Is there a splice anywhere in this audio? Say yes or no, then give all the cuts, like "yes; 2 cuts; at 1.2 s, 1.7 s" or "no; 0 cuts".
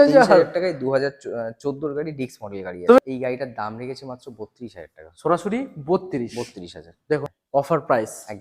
yes; 2 cuts; at 3.0 s, 7.3 s